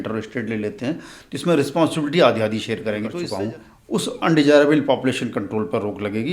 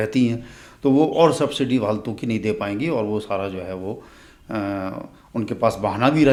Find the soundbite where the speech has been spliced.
first; 1 cut; at 3.2 s

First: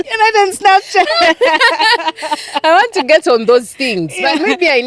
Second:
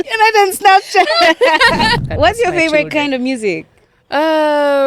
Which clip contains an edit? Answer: second; 1 cut; at 2.0 s

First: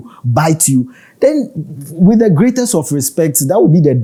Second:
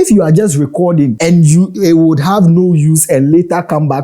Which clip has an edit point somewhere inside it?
second; 1 cut; at 1.2 s

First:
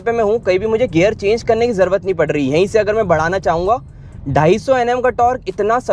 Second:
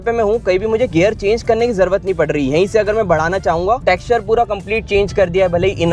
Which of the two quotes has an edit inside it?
second; 1 cut; at 3.8 s

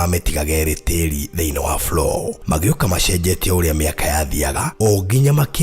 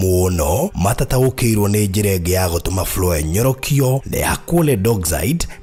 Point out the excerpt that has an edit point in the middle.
first; 1 cut; at 4.6 s

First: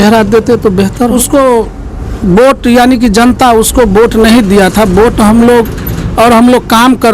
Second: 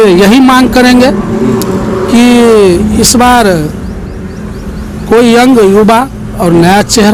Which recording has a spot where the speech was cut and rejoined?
first; 1 cut; at 1.2 s

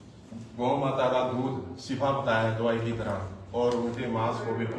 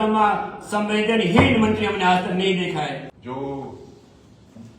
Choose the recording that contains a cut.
second; 1 cut; at 3.1 s

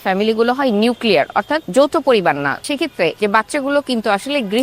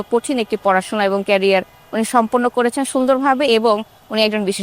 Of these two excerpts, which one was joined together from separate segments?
first; 2 cuts; at 1.6 s, 2.7 s

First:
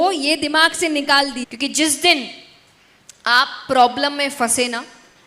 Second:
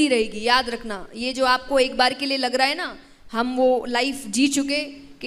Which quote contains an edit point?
first; 1 cut; at 1.5 s

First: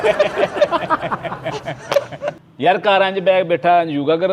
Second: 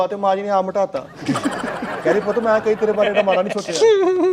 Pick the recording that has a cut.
first; 1 cut; at 2.5 s

